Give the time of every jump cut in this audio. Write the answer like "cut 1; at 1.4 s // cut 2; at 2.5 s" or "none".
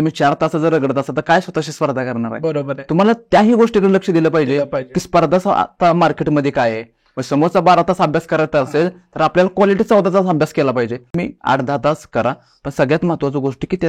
cut 1; at 11.1 s